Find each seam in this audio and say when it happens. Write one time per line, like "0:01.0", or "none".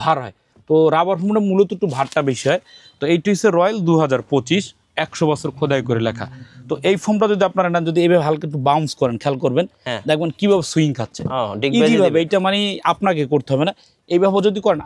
none

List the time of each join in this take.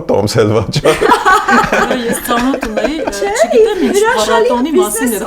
none

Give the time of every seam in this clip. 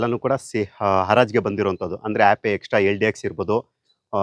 none

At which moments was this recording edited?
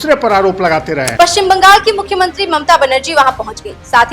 0:01.1

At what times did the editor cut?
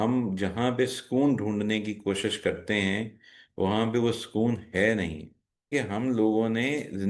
0:05.7

